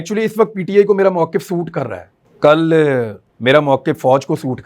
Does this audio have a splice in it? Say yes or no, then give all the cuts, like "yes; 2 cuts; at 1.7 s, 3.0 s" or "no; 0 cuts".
yes; 1 cut; at 3.2 s